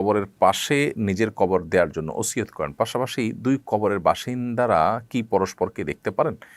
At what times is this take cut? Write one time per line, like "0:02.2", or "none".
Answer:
none